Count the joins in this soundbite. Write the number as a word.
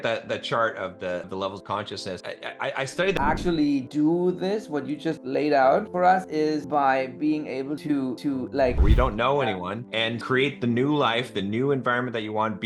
two